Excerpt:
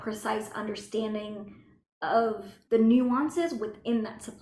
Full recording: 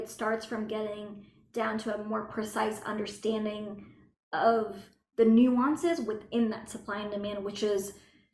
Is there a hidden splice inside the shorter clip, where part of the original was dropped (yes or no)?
yes